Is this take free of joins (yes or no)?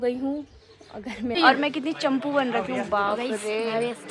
no